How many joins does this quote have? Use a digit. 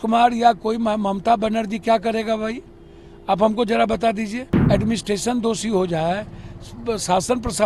1